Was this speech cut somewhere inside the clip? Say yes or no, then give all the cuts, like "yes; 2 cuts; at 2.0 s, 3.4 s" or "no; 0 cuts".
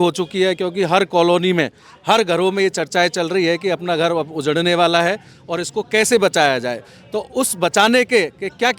no; 0 cuts